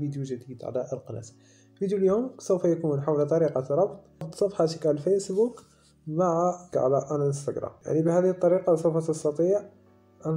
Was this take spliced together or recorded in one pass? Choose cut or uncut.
cut